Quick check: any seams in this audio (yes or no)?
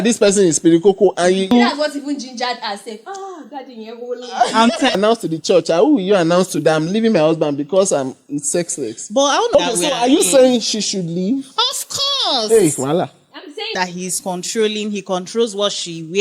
yes